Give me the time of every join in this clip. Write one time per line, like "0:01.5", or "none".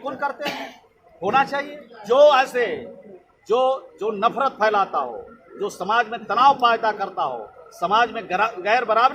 none